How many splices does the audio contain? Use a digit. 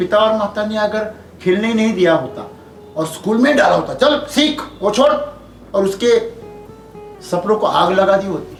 0